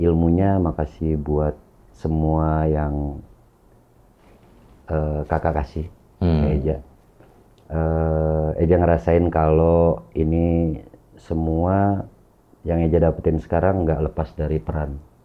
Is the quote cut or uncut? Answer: uncut